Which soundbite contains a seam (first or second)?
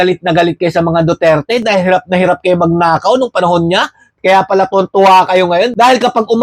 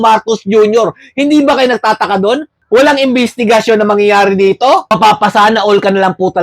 second